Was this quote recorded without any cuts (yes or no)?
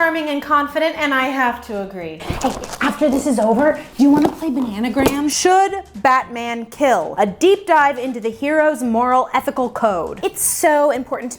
no